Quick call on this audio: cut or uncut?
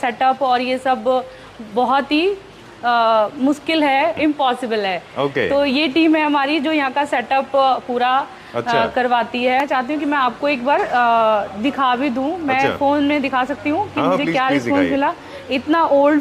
cut